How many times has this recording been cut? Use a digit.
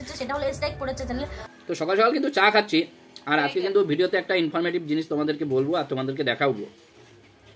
1